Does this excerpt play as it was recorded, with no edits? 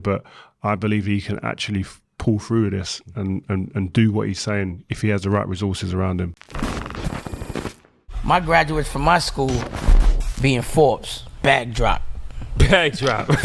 no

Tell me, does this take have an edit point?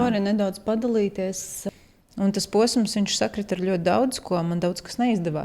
yes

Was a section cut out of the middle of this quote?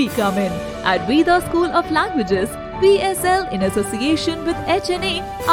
no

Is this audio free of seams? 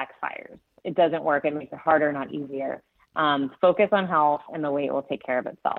yes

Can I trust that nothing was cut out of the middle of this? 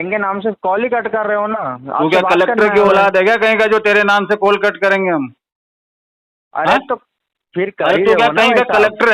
yes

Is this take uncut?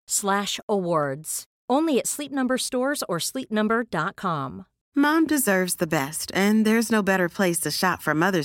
yes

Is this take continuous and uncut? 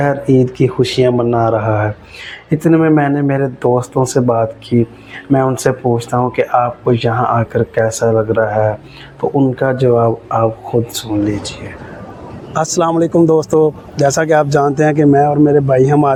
yes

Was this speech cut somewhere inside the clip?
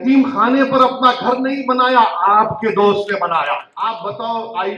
yes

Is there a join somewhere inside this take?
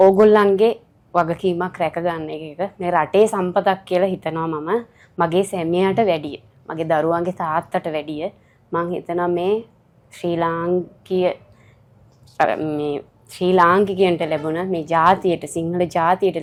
no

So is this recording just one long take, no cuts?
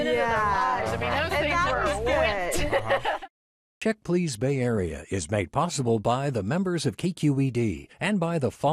no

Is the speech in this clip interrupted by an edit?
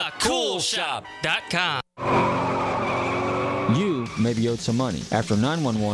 yes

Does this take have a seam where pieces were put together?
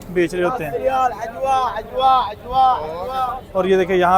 no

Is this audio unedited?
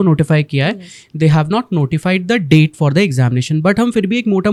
yes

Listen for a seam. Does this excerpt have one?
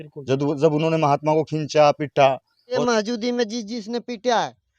yes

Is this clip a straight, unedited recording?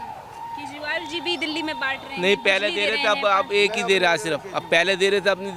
yes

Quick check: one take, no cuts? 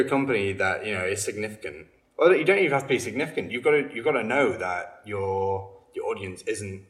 yes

